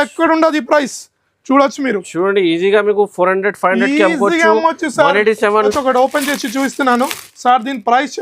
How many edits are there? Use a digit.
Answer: 1